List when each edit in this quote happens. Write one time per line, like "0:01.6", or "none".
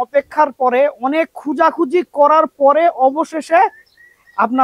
none